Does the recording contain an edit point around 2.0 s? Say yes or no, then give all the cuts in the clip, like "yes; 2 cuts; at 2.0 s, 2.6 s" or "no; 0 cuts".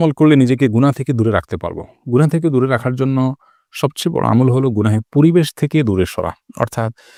no; 0 cuts